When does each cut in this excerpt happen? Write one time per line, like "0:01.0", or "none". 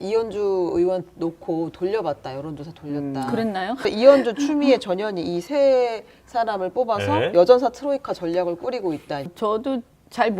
0:03.9
0:09.3